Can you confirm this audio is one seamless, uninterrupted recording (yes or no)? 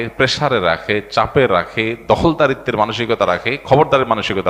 yes